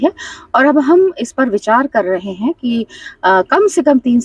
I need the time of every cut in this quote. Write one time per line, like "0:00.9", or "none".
none